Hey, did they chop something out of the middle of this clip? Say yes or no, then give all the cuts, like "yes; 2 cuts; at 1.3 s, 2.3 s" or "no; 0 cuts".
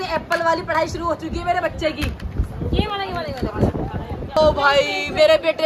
no; 0 cuts